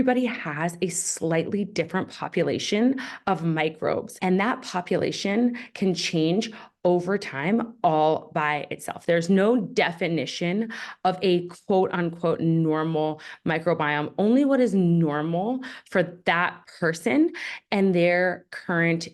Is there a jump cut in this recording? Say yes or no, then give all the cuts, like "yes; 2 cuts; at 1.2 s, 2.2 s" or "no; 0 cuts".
no; 0 cuts